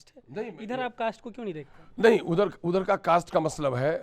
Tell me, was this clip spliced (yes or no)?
no